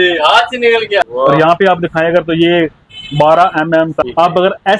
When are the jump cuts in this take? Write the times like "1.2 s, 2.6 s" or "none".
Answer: 1.1 s, 4.0 s